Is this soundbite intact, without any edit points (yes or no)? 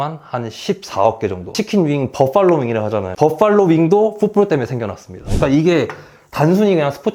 no